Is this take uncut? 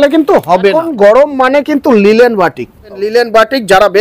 no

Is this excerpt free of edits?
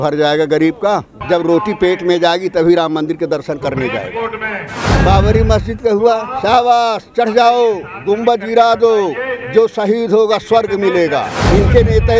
no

